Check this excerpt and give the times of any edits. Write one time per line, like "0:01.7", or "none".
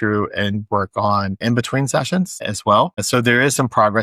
0:01.4
0:03.0